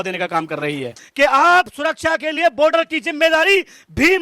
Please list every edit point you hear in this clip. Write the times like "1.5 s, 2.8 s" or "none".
1.0 s